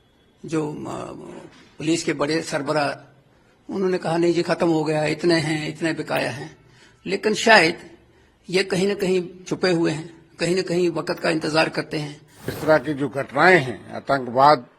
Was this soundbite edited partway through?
yes; 1 cut; at 12.6 s

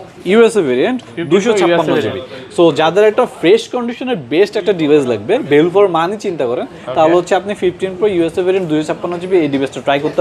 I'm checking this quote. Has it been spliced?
no; 0 cuts

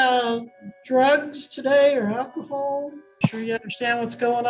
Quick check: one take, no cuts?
no; 1 cut; at 3.0 s

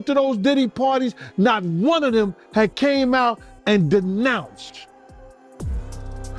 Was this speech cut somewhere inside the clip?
no; 0 cuts

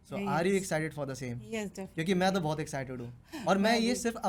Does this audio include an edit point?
no; 0 cuts

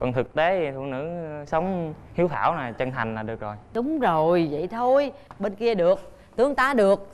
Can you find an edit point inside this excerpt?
no; 0 cuts

